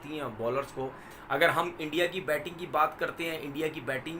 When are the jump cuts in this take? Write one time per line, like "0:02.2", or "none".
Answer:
0:01.1